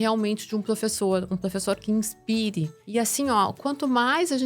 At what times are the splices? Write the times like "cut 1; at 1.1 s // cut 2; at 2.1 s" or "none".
cut 1; at 2.8 s